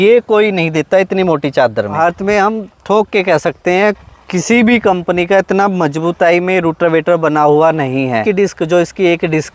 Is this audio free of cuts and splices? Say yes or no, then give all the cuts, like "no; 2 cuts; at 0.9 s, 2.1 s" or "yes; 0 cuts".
no; 2 cuts; at 2.0 s, 8.2 s